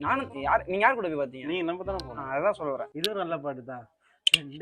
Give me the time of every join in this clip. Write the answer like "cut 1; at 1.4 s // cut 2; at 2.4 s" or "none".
cut 1; at 2.8 s